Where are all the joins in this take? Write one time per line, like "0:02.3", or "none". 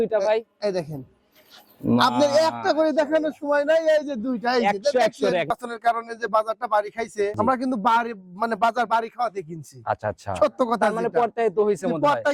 0:05.5
0:07.3